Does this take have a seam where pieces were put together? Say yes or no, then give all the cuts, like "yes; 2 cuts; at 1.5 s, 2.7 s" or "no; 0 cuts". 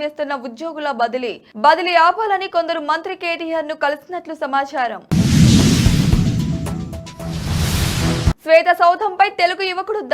no; 0 cuts